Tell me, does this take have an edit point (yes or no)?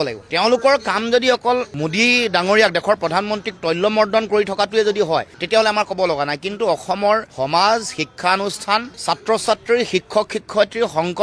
no